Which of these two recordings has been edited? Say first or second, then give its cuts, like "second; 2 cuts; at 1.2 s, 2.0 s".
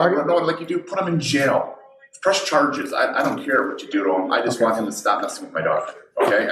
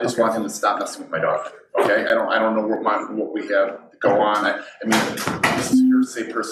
first; 1 cut; at 3.1 s